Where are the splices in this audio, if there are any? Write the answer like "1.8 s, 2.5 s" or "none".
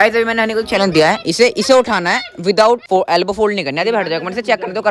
2.8 s